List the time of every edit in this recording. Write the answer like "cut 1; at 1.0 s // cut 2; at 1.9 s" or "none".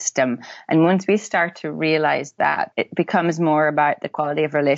cut 1; at 2.7 s